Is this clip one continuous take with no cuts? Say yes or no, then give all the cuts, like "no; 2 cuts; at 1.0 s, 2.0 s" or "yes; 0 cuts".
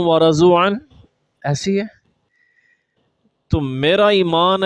yes; 0 cuts